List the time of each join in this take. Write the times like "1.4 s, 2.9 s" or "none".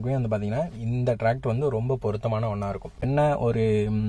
3.1 s

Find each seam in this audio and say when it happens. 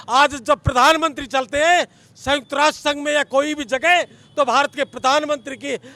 none

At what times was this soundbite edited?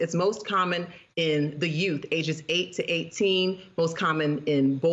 none

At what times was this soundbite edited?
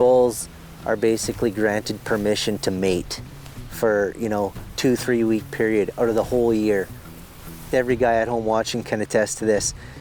none

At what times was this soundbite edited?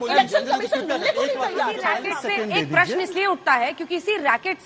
2.1 s

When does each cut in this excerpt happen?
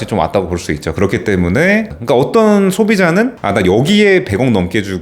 1.9 s, 3.4 s

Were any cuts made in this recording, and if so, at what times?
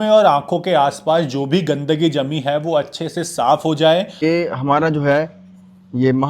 4.2 s

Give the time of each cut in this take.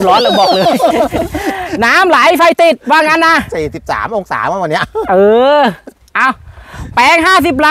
none

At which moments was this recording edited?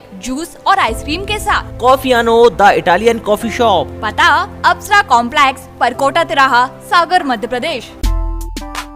7.9 s

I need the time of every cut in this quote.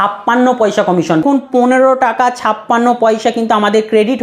1.2 s

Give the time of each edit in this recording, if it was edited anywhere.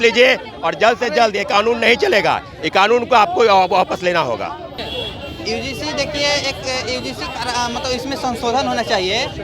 4.8 s

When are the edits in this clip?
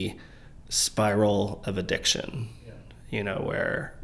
none

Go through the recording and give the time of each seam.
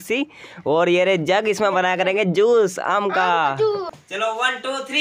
4.0 s

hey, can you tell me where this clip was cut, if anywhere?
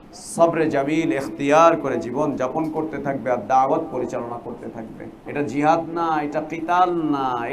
5.2 s

